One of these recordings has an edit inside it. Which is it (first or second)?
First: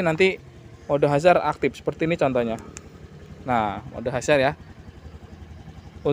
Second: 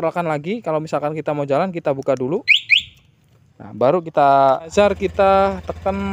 second